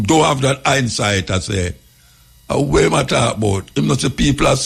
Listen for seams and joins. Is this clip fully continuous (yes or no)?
yes